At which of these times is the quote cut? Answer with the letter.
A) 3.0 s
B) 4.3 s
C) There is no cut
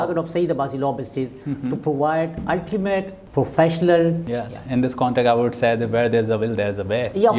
B